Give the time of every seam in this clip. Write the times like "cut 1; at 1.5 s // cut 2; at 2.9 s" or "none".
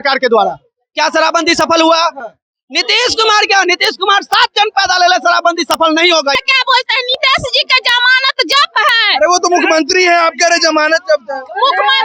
cut 1; at 6.4 s